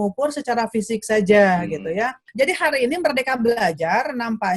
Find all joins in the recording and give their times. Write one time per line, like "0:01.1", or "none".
0:02.2